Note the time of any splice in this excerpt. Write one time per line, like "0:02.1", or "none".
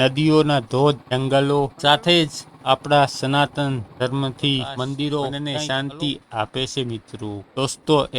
0:05.4